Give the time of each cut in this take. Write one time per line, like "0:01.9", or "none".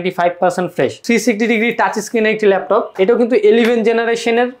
0:01.0
0:02.9